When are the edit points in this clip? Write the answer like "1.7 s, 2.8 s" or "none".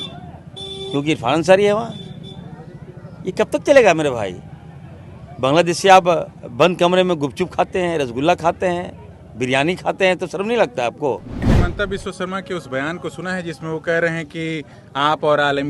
11.4 s